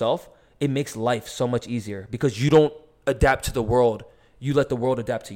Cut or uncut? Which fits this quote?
uncut